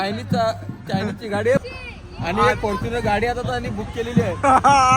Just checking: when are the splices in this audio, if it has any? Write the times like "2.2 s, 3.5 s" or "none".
1.6 s